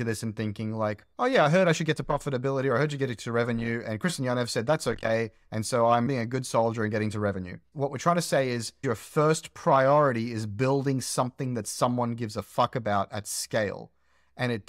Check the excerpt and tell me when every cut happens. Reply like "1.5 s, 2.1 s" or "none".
8.8 s